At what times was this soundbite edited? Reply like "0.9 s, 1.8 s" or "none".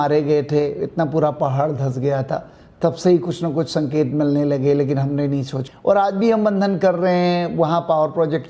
5.6 s